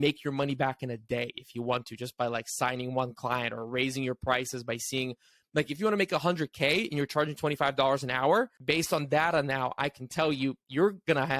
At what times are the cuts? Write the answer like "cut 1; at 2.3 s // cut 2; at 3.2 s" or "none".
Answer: cut 1; at 8.6 s